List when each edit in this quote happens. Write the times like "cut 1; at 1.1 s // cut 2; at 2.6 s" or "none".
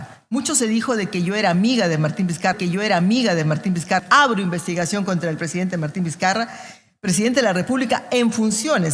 cut 1; at 4.0 s